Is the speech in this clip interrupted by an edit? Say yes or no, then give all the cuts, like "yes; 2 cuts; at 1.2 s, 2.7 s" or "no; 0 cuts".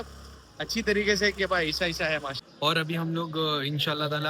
yes; 1 cut; at 2.4 s